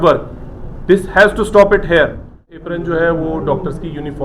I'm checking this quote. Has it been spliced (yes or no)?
yes